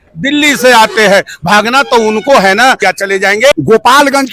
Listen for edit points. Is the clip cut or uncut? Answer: cut